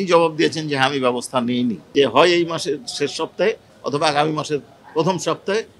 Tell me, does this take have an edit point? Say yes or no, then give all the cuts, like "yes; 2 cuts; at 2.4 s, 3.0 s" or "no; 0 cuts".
yes; 1 cut; at 1.8 s